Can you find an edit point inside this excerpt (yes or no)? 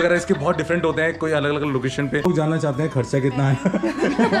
yes